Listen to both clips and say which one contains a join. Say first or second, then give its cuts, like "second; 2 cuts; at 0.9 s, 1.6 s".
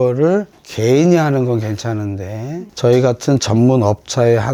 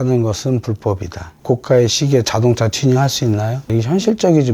second; 1 cut; at 1.3 s